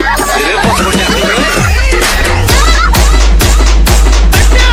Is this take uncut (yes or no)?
yes